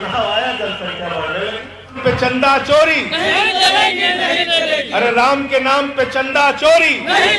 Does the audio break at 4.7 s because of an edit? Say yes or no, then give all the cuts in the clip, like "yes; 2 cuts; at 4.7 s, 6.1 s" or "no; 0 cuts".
no; 1 cut; at 2.0 s